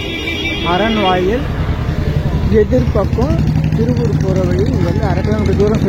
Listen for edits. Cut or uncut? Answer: uncut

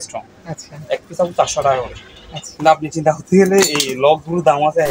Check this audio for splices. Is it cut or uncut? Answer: uncut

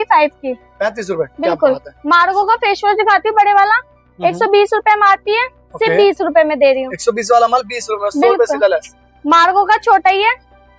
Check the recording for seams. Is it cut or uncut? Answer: uncut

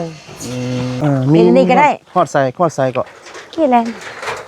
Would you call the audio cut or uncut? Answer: cut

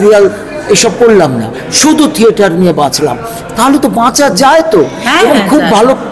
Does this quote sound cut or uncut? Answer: uncut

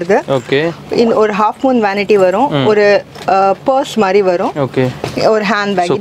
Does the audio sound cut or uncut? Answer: uncut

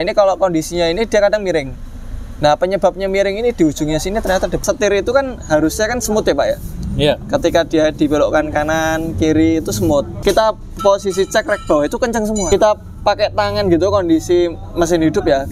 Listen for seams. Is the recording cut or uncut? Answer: cut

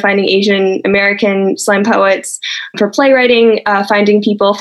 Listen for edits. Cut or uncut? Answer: cut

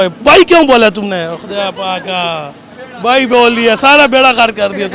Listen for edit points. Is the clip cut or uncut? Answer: uncut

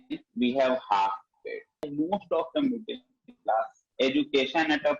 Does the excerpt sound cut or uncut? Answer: cut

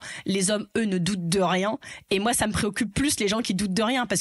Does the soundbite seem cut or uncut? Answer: uncut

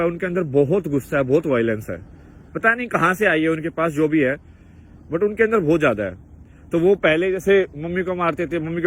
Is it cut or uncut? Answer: uncut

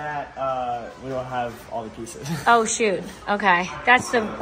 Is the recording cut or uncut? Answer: uncut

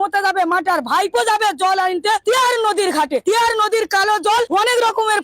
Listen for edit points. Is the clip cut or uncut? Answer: cut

